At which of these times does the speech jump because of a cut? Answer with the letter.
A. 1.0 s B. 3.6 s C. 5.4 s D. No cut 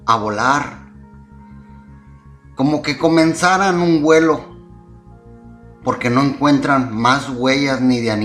B